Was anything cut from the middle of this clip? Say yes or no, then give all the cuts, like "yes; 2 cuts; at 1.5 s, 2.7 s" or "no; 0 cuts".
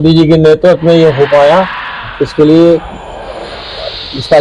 no; 0 cuts